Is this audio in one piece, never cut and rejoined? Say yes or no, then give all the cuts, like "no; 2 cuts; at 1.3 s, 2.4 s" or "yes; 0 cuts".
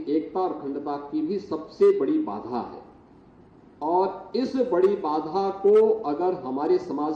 yes; 0 cuts